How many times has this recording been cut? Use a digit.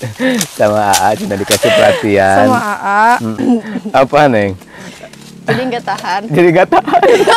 1